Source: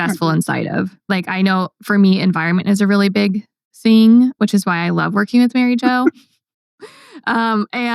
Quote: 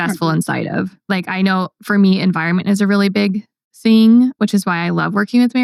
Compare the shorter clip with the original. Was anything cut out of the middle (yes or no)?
no